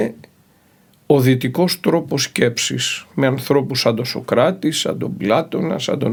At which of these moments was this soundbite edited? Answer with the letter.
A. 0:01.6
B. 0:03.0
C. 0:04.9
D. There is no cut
D